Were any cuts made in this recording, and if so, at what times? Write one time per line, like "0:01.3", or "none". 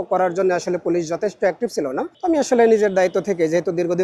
none